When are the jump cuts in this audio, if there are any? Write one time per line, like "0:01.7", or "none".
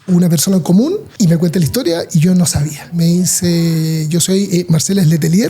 0:01.1
0:03.0